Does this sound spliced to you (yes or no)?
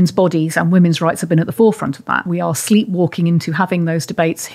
yes